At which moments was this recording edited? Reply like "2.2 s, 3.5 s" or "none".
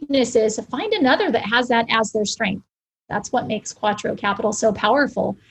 2.9 s